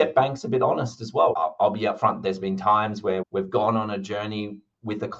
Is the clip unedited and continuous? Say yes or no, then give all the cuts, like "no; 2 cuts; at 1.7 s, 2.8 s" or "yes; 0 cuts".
no; 1 cut; at 1.4 s